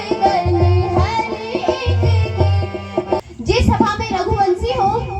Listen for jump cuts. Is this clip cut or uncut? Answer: cut